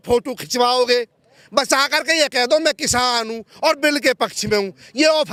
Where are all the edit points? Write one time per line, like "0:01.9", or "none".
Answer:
none